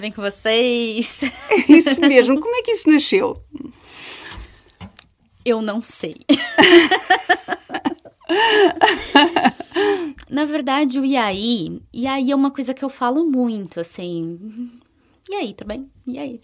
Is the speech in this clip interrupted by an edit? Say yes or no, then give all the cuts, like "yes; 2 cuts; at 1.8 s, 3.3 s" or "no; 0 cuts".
no; 0 cuts